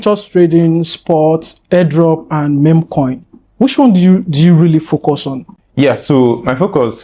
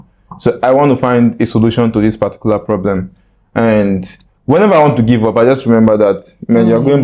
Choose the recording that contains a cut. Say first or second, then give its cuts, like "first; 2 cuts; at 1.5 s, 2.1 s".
first; 1 cut; at 1.5 s